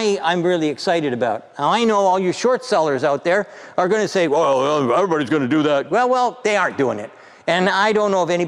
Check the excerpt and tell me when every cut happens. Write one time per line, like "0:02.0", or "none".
0:01.5